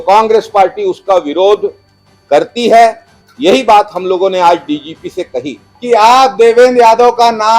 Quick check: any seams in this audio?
yes; 1 cut; at 5.7 s

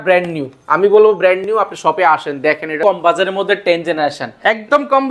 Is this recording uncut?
no; 1 cut; at 2.8 s

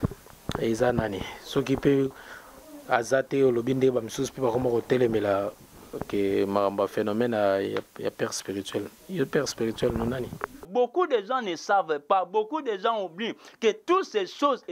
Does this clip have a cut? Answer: yes; 1 cut; at 10.6 s

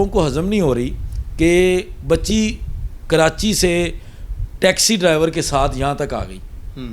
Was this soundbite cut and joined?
no; 0 cuts

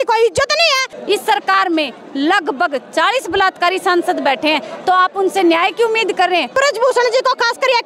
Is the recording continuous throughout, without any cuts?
no; 2 cuts; at 0.9 s, 6.5 s

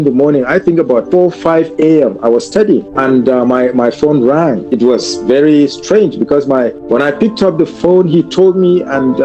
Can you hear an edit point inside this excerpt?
yes; 4 cuts; at 1.1 s, 2.9 s, 4.6 s, 6.8 s

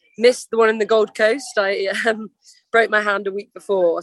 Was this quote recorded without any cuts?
yes; 0 cuts

